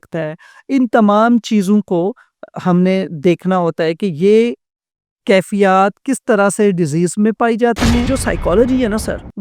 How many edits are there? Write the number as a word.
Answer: one